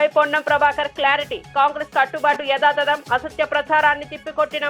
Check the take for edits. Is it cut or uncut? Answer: uncut